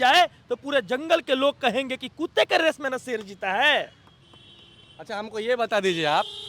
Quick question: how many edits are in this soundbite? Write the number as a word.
zero